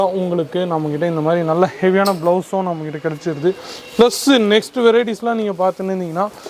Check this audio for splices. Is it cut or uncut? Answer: uncut